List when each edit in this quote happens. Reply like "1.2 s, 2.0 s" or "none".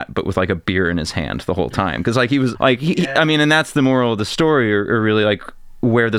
2.5 s

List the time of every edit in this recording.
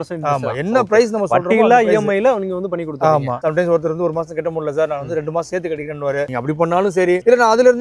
3.4 s, 6.9 s

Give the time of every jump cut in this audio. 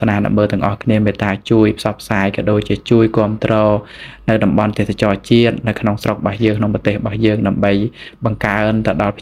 none

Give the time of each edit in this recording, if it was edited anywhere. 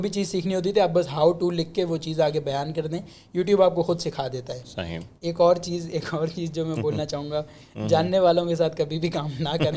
5.1 s

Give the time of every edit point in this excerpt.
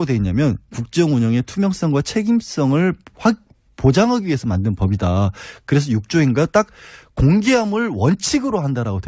4.8 s

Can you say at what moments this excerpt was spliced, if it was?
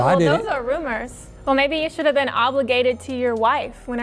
1.4 s

